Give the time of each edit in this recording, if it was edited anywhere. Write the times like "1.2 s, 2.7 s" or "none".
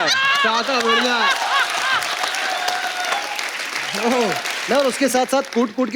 4.5 s

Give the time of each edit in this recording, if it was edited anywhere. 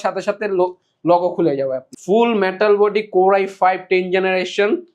1.9 s

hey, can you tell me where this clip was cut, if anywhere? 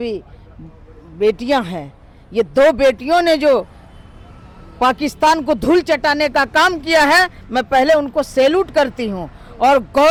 none

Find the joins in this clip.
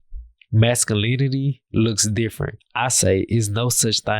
2.6 s

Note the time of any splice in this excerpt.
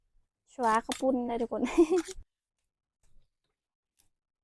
2.2 s

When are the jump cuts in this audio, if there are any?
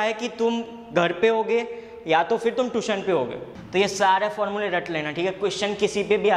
3.5 s

